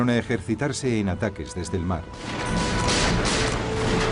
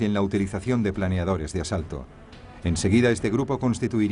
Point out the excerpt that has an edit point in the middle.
second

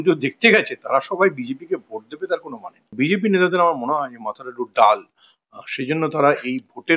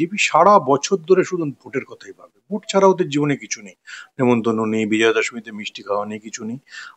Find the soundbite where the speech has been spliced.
first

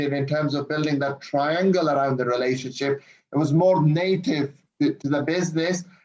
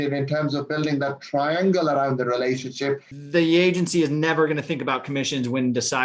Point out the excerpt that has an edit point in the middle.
second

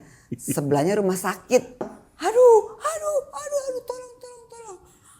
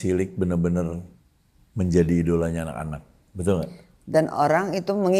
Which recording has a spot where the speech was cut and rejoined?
first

